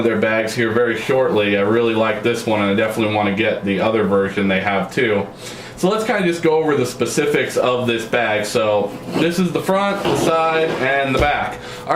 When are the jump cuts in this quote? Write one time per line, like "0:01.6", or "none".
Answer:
0:01.5